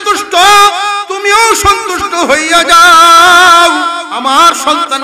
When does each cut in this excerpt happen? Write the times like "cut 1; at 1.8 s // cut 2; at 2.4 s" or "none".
cut 1; at 1.0 s // cut 2; at 4.0 s